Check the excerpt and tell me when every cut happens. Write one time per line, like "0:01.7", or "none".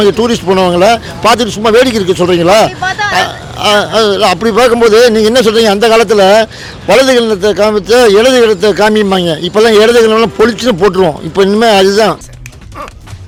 none

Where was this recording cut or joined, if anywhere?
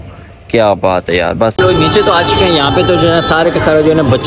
0:01.6

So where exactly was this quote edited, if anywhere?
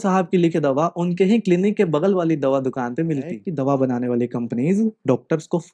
0:03.4

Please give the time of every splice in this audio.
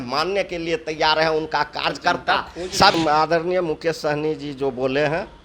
0:02.9

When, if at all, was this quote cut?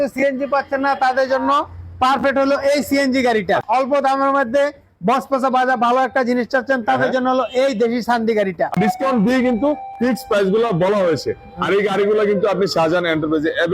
0:03.6
0:08.8

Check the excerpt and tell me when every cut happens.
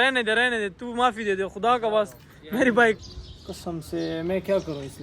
0:03.0

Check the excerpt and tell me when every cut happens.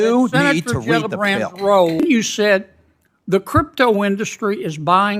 0:02.0

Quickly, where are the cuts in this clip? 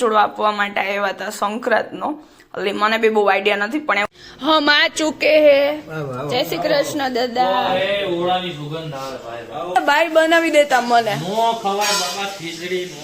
0:04.1
0:09.8

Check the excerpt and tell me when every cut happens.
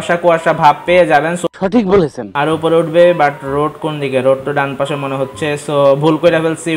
0:02.2

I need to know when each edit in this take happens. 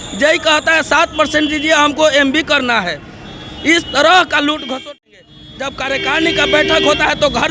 0:05.0

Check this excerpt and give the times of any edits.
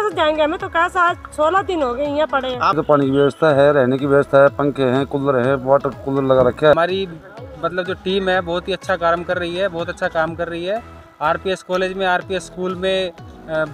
0:02.8
0:06.7

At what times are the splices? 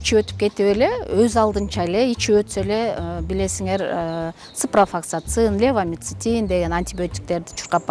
none

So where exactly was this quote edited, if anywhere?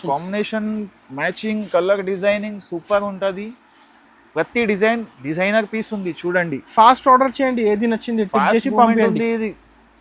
none

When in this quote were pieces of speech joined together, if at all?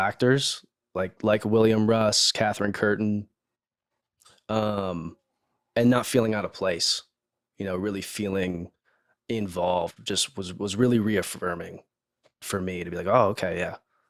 none

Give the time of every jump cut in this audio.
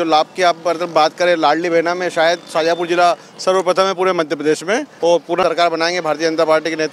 none

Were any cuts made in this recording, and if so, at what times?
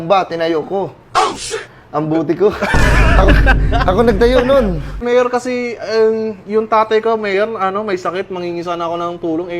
0:05.0

